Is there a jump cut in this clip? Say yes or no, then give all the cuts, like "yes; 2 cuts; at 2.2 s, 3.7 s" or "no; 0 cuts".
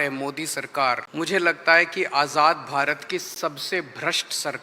yes; 1 cut; at 1.1 s